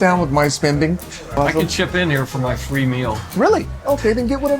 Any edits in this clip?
yes; 1 cut; at 1.3 s

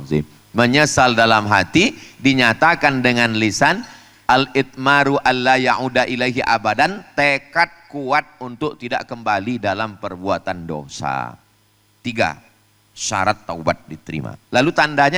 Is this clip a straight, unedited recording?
yes; 0 cuts

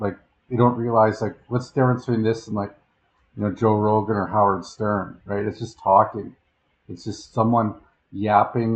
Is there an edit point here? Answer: no; 0 cuts

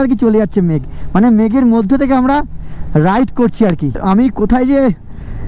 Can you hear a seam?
yes; 1 cut; at 3.9 s

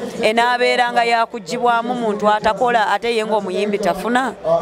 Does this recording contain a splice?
no; 0 cuts

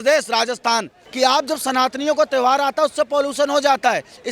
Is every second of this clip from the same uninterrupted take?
no; 1 cut; at 1.0 s

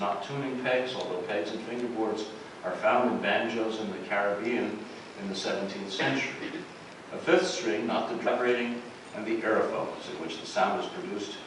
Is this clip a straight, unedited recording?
yes; 0 cuts

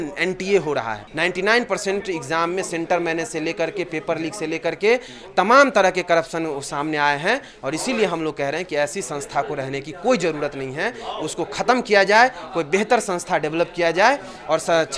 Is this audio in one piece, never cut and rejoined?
no; 1 cut; at 1.0 s

